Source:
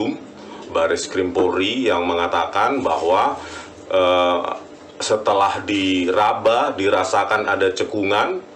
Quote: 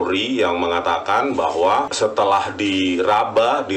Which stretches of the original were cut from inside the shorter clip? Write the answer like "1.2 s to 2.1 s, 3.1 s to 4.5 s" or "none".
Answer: 3.4 s to 5.0 s